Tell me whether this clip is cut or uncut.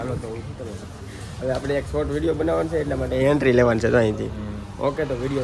uncut